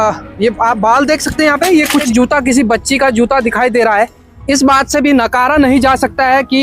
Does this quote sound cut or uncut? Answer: cut